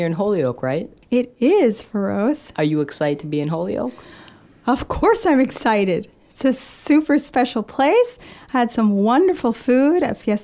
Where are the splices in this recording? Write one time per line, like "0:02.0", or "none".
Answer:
0:00.9